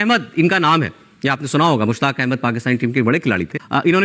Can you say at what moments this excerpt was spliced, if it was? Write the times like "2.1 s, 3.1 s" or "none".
none